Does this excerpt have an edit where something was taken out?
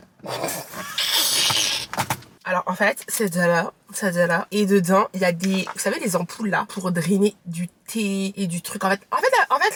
no; 0 cuts

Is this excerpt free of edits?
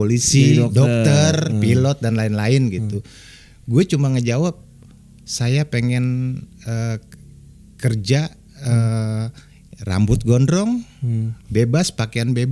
yes; 0 cuts

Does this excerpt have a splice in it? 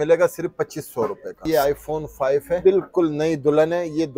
yes; 2 cuts; at 1.4 s, 2.6 s

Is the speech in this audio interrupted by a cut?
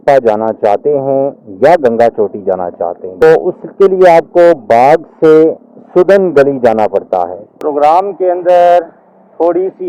yes; 2 cuts; at 3.2 s, 7.4 s

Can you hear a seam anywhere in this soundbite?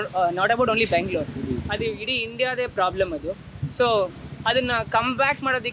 no; 0 cuts

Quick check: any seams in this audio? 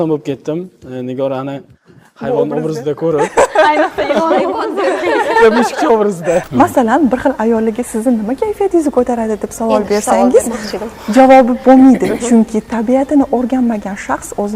yes; 1 cut; at 6.5 s

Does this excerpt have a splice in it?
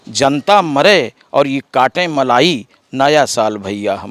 no; 0 cuts

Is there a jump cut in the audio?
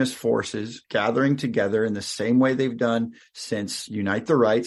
no; 0 cuts

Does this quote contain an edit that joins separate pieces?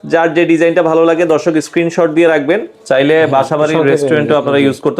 yes; 1 cut; at 2.7 s

